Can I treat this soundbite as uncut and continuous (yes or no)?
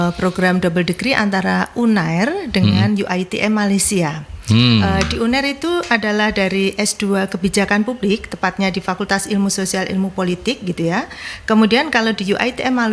yes